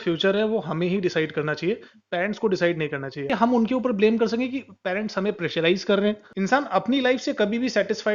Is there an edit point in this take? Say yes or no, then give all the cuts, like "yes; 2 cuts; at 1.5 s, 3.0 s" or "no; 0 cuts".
yes; 2 cuts; at 3.3 s, 6.3 s